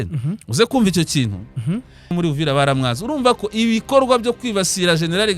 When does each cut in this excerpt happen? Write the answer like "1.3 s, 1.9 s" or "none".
2.1 s